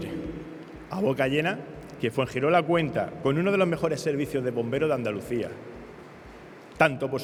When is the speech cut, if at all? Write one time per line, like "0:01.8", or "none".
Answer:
none